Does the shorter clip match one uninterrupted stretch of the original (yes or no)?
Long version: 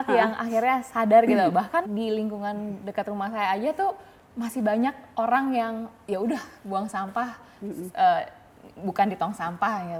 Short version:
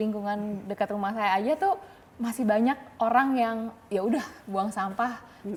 yes